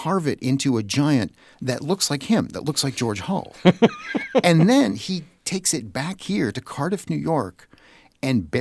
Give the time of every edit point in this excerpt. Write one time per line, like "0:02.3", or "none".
none